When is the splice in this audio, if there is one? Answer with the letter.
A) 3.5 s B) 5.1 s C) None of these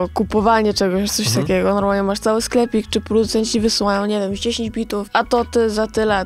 B